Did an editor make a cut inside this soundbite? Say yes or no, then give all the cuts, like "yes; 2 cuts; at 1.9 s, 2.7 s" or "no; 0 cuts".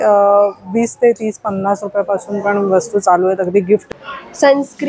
yes; 1 cut; at 3.8 s